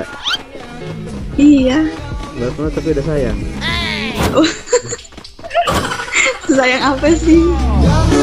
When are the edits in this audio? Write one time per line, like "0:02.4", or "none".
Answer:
none